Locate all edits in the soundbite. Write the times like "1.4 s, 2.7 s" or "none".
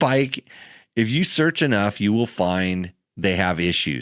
none

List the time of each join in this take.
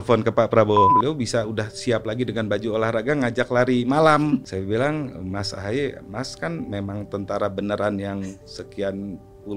0.9 s, 4.4 s

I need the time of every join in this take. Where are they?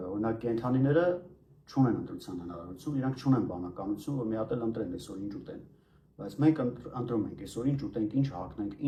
none

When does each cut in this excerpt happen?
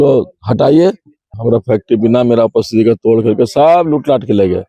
1.2 s

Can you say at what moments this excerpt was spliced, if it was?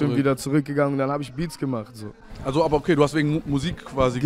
none

